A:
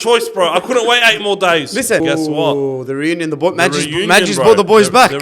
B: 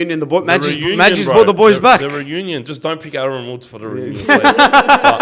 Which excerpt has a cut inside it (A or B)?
A